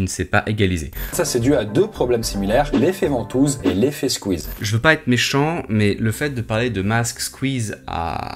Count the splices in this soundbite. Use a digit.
2